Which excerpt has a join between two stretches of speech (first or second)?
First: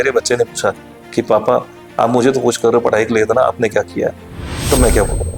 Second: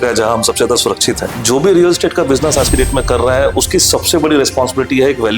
second